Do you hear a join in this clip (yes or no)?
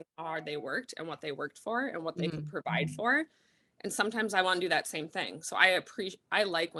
no